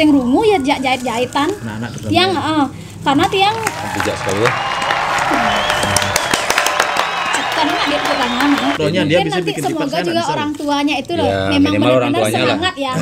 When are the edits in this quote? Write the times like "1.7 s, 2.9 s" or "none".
8.8 s